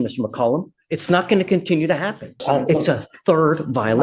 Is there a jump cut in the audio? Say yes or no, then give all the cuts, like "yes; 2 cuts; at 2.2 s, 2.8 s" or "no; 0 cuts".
yes; 1 cut; at 2.4 s